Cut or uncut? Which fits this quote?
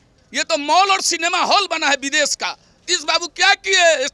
cut